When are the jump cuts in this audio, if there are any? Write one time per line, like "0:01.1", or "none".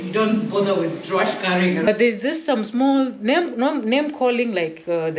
0:01.9